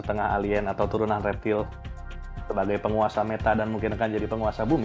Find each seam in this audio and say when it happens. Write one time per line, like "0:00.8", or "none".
none